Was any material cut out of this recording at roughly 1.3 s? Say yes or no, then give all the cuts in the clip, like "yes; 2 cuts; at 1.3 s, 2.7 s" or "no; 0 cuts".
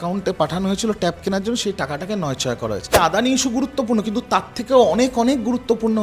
no; 1 cut; at 3.0 s